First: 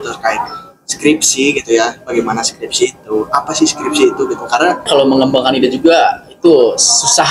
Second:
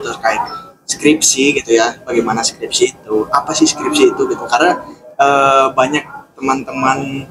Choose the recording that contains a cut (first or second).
first